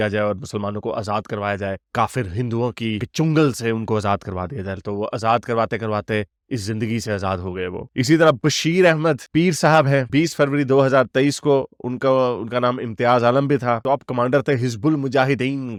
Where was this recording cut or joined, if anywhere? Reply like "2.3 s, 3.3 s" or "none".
none